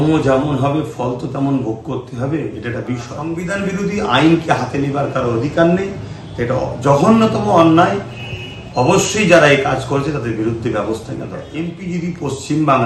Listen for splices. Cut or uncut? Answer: cut